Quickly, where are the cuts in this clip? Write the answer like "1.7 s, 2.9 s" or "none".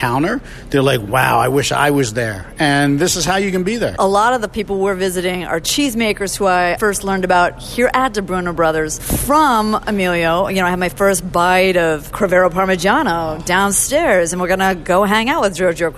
3.9 s, 5.7 s, 6.8 s, 9.0 s